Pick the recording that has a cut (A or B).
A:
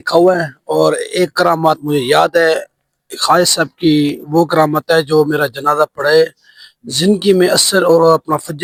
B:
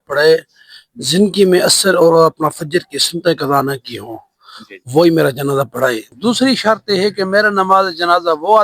B